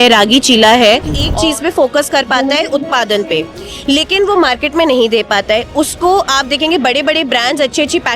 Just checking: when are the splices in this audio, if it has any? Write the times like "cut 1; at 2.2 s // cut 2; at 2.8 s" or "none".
cut 1; at 1.2 s